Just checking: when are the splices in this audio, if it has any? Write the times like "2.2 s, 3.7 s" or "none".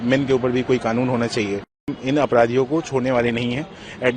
1.9 s

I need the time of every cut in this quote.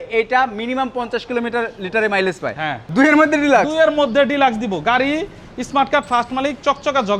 2.7 s

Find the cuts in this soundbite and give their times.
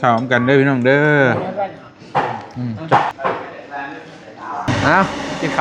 none

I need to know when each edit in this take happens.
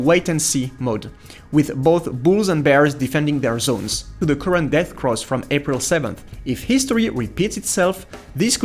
4.2 s

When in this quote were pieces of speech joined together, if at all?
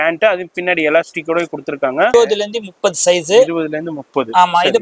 2.1 s

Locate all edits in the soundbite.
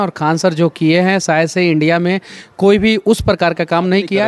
none

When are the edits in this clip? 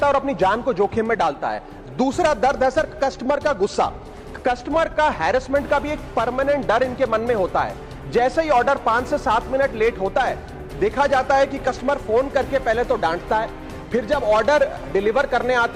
none

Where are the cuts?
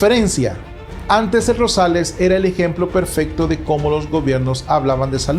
none

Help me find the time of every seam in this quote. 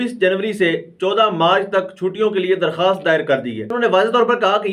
3.8 s

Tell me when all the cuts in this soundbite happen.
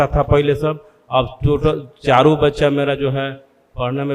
none

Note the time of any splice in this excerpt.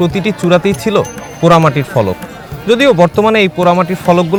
none

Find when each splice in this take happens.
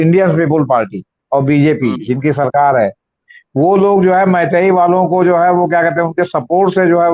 none

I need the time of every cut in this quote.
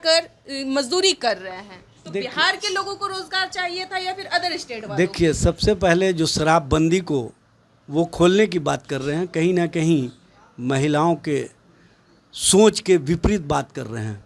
none

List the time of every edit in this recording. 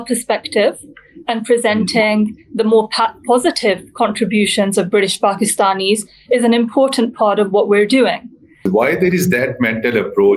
8.5 s

